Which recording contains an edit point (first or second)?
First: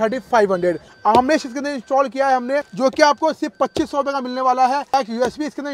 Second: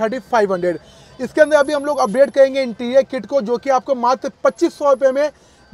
first